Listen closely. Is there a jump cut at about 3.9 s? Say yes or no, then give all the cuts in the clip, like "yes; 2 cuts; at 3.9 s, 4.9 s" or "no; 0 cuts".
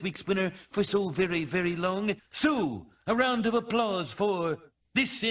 no; 1 cut; at 2.2 s